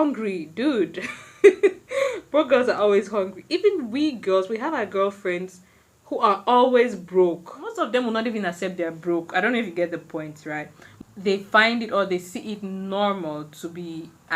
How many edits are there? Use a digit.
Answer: 2